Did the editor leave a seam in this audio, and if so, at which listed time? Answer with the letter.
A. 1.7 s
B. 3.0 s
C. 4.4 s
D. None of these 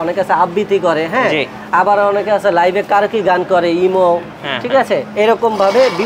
D